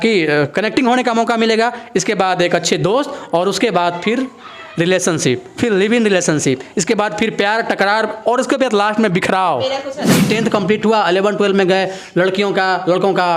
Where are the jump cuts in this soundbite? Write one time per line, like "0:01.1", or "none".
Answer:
0:10.2